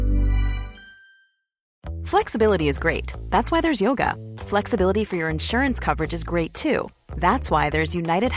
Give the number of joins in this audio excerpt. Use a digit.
0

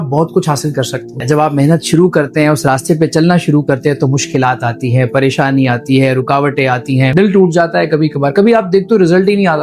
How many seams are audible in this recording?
2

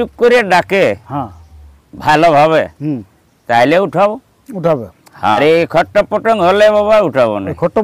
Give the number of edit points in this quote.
1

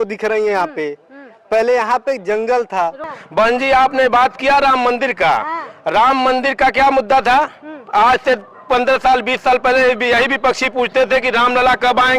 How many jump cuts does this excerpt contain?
1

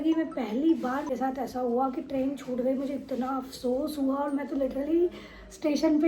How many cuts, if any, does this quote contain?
0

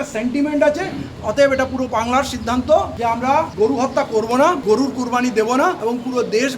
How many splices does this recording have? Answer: 4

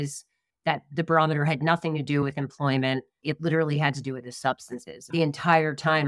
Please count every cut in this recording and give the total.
2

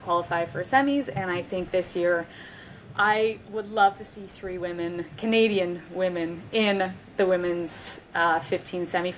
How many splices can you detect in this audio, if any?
0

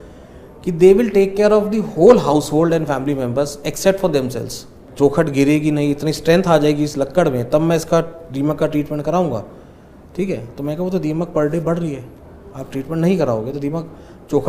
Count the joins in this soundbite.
1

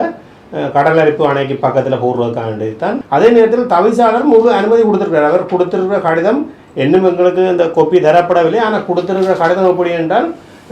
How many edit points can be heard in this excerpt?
1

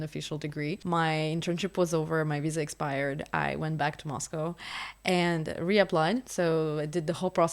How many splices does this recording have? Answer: 2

